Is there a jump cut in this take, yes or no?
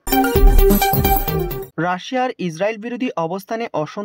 yes